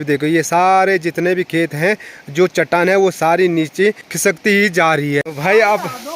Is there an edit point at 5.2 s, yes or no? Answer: yes